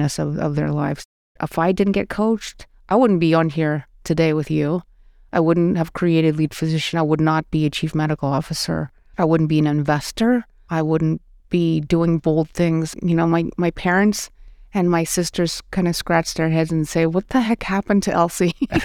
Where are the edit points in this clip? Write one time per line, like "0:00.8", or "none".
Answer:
0:09.0
0:10.6
0:12.9